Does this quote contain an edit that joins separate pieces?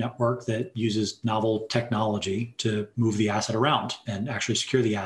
yes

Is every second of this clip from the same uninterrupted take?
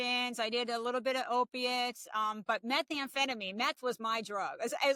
yes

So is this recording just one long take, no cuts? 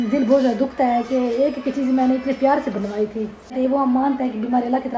no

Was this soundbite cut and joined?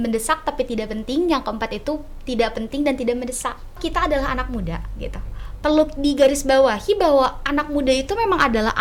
yes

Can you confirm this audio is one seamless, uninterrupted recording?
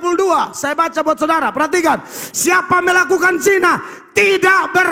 yes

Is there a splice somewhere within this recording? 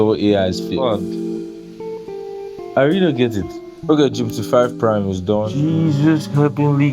yes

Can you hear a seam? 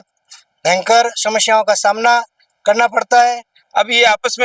yes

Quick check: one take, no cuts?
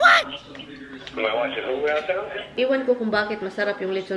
no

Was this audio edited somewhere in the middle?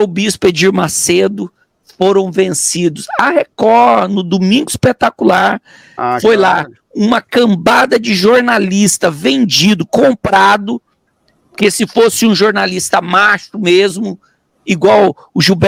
no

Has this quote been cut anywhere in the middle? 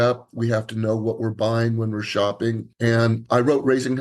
yes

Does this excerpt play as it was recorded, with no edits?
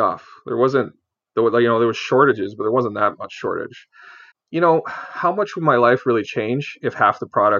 no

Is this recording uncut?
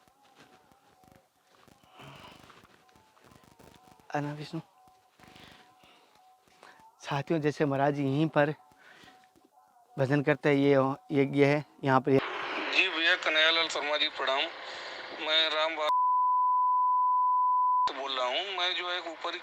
no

